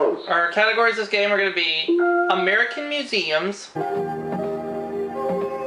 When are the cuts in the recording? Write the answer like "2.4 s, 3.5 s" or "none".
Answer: none